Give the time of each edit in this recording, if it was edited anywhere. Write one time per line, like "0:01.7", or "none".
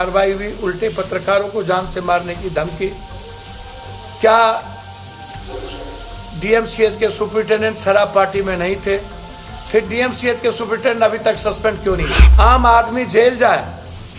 0:12.2